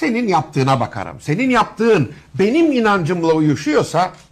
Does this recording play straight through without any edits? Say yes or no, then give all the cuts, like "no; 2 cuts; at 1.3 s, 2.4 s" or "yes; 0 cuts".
no; 1 cut; at 3.4 s